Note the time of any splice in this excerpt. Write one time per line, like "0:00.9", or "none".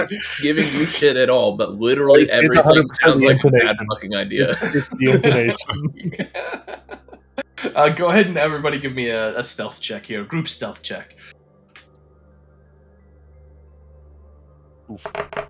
none